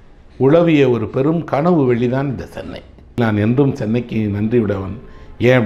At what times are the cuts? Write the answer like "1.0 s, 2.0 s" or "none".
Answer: 3.2 s